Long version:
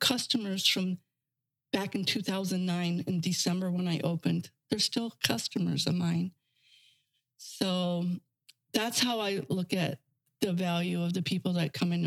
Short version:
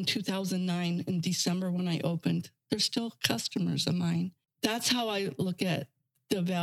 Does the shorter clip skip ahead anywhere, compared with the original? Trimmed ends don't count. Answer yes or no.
yes